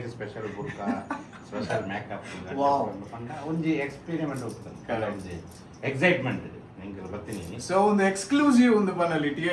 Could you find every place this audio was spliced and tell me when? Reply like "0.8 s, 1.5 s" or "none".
none